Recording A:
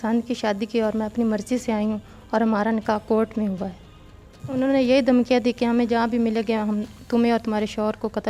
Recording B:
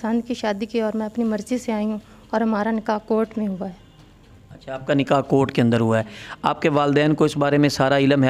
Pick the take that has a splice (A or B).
A